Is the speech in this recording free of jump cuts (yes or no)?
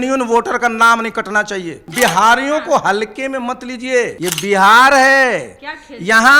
no